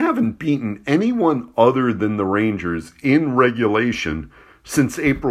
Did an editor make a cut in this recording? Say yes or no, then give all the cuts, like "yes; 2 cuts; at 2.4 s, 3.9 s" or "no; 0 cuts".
no; 0 cuts